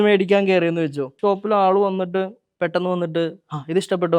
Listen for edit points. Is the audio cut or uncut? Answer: cut